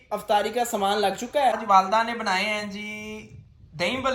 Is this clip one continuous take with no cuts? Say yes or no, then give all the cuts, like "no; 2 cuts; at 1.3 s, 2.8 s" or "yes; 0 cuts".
no; 1 cut; at 1.6 s